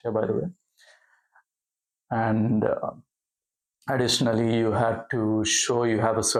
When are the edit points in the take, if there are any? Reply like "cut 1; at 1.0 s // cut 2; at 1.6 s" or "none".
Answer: none